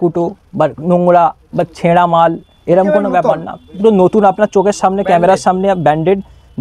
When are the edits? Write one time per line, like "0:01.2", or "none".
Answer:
none